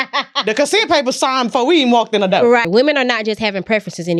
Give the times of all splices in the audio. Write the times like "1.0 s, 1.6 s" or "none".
2.6 s